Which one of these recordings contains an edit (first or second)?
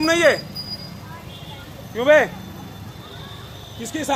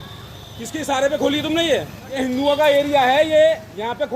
second